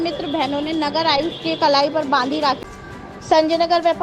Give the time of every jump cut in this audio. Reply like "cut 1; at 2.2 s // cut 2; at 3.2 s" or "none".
cut 1; at 2.6 s